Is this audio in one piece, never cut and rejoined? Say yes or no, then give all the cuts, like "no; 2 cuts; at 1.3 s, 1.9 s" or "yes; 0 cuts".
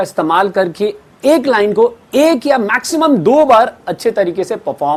yes; 0 cuts